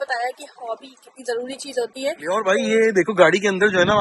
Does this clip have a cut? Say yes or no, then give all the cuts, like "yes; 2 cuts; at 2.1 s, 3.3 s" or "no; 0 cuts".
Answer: yes; 1 cut; at 2.4 s